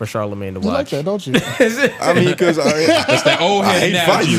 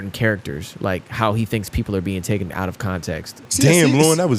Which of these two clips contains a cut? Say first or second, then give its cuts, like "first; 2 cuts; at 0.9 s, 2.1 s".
second; 1 cut; at 3.5 s